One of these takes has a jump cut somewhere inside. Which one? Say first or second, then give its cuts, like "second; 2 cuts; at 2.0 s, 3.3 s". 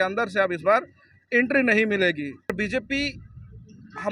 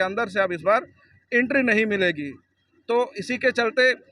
first; 1 cut; at 2.5 s